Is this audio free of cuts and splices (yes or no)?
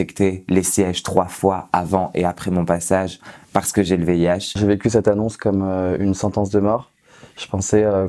no